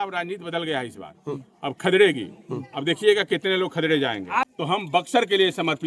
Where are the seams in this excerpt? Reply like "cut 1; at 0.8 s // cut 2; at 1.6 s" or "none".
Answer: cut 1; at 4.4 s